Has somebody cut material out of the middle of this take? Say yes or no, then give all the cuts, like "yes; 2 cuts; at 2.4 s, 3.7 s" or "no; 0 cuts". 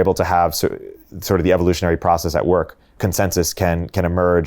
yes; 1 cut; at 2.9 s